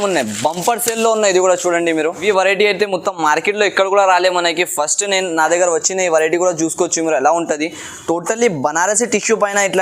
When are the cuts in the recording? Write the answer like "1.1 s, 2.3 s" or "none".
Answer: 2.2 s